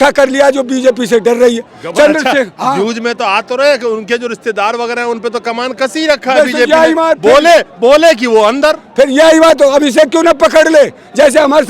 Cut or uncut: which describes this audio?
uncut